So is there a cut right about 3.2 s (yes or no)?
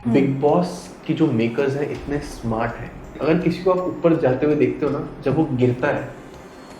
yes